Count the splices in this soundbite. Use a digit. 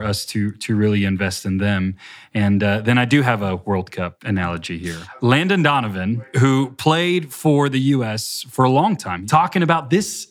3